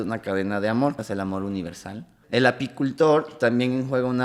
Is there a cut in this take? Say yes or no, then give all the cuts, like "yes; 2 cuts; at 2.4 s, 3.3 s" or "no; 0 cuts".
yes; 2 cuts; at 1.0 s, 2.1 s